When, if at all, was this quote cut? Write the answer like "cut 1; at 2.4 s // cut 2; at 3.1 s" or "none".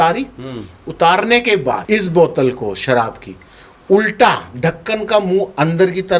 cut 1; at 1.8 s